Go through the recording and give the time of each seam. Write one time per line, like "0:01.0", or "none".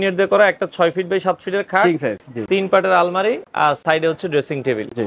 none